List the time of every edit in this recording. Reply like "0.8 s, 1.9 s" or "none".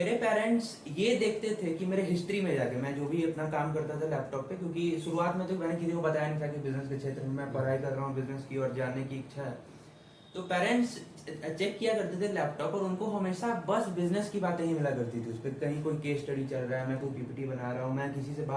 none